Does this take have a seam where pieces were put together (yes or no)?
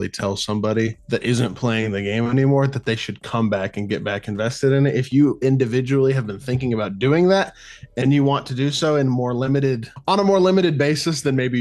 no